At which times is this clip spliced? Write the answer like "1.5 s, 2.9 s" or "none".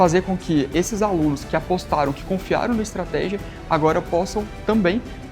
1.4 s